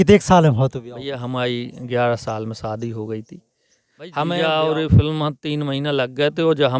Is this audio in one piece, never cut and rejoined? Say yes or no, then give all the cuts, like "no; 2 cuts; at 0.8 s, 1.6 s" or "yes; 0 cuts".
no; 1 cut; at 4.1 s